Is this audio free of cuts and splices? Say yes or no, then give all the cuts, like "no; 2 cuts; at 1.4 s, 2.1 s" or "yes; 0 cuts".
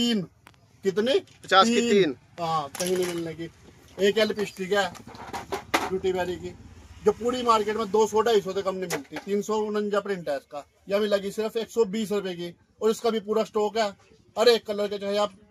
yes; 0 cuts